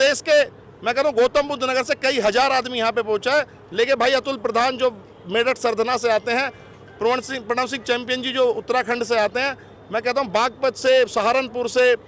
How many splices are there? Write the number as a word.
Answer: zero